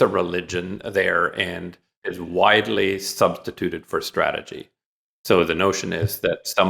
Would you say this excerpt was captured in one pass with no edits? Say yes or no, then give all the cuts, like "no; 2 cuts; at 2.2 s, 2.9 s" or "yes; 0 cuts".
no; 1 cut; at 2.0 s